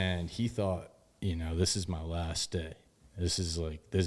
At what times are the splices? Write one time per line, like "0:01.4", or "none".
none